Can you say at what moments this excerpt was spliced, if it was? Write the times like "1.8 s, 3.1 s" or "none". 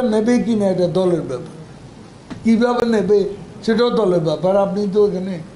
none